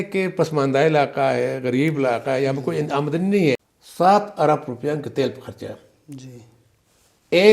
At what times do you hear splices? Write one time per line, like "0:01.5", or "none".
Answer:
0:03.7